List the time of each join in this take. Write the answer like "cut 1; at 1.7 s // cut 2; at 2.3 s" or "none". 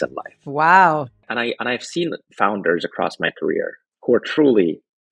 cut 1; at 1.2 s // cut 2; at 3.8 s